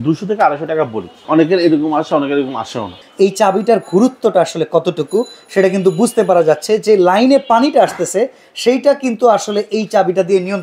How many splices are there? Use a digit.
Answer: 2